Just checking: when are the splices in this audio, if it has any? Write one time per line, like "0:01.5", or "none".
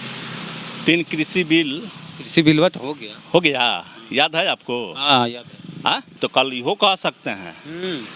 0:06.2

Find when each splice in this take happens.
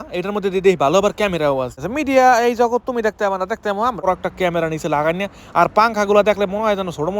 0:01.8
0:04.0

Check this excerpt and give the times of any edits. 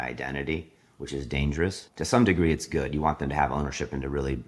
0:01.8

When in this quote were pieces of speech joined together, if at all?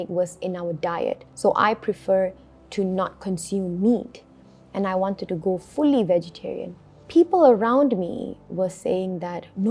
0:01.3
0:06.9

